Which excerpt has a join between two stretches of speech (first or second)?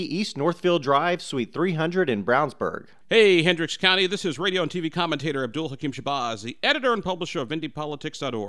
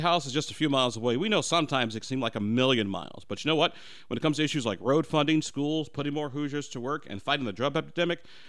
first